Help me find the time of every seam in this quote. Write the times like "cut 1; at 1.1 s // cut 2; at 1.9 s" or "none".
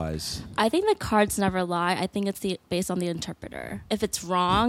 cut 1; at 3.8 s